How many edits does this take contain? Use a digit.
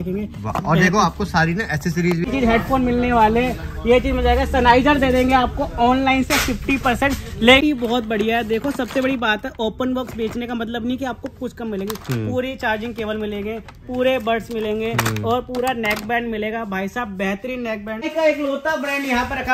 3